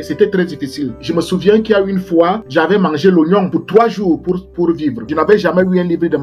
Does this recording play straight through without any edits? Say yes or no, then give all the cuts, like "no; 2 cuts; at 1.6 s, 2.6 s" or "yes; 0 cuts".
no; 4 cuts; at 1.0 s, 2.4 s, 3.5 s, 5.0 s